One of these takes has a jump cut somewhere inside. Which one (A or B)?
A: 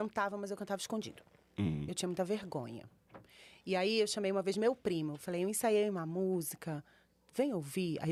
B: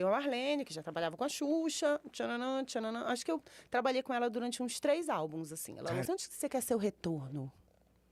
B